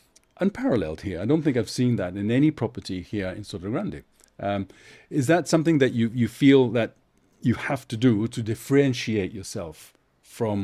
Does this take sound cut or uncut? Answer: uncut